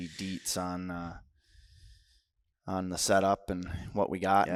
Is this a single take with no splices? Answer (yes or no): yes